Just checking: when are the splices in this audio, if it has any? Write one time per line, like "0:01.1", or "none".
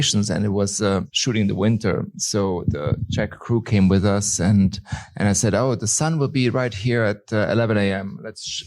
0:01.1